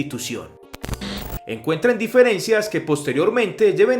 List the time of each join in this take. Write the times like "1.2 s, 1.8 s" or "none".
1.0 s